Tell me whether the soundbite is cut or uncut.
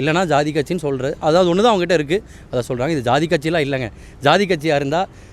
uncut